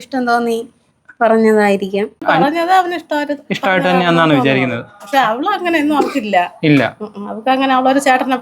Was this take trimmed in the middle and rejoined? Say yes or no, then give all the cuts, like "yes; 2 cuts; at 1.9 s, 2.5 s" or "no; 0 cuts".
yes; 1 cut; at 2.2 s